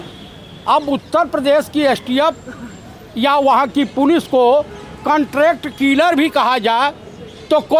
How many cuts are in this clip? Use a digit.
0